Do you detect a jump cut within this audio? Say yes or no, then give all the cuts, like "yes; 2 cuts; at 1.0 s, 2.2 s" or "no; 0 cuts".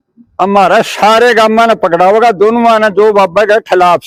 no; 0 cuts